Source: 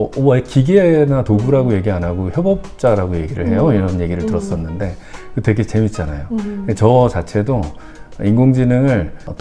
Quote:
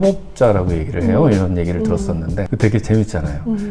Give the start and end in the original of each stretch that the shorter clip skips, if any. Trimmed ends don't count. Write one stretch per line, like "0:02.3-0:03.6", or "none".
0:04.9-0:05.3